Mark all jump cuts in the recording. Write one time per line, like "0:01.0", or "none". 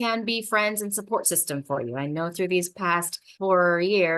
0:03.2